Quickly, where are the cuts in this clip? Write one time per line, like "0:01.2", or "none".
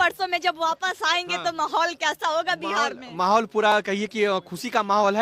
none